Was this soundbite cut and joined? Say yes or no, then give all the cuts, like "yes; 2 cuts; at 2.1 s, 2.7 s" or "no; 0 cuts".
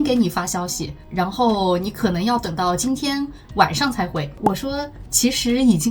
yes; 1 cut; at 4.4 s